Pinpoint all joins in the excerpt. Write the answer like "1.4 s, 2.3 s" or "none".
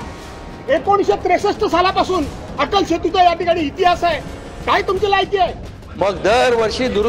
5.7 s